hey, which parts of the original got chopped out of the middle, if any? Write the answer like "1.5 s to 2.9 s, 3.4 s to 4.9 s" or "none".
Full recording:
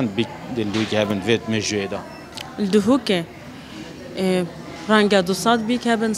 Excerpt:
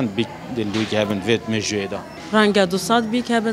2.1 s to 4.7 s